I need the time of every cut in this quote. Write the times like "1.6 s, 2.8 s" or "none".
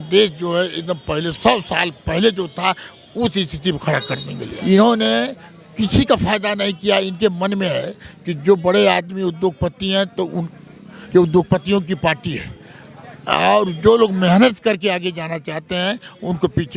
4.5 s